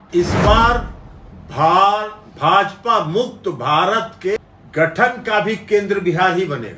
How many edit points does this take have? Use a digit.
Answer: 1